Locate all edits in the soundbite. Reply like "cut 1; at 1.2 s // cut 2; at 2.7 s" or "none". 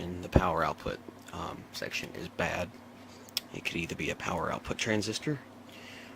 cut 1; at 3.7 s

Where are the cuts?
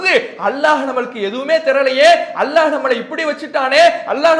none

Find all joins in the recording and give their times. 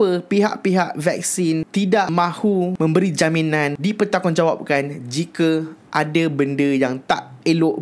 cut 1; at 3.8 s

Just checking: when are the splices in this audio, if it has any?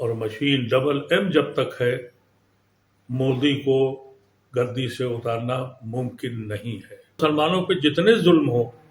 cut 1; at 7.2 s

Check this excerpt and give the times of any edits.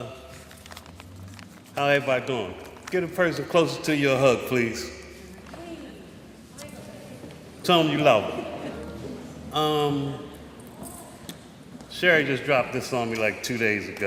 none

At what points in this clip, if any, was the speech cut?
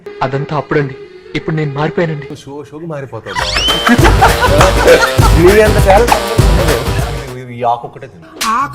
cut 1; at 7.0 s

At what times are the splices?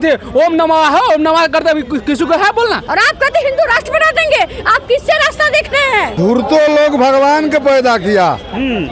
cut 1; at 2.8 s // cut 2; at 6.2 s

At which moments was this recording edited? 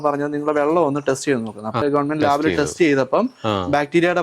cut 1; at 1.8 s

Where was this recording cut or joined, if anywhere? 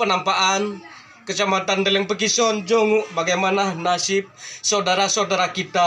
none

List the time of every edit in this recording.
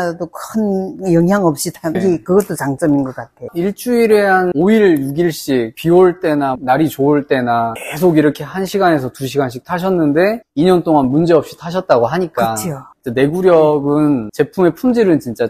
cut 1; at 2.0 s // cut 2; at 4.5 s // cut 3; at 7.8 s

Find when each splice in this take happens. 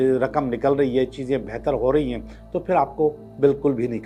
none

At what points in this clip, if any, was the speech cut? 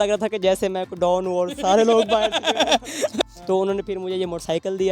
cut 1; at 3.2 s

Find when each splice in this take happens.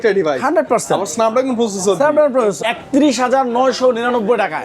cut 1; at 2.6 s

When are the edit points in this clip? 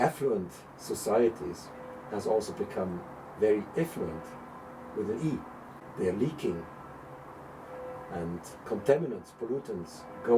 cut 1; at 5.8 s

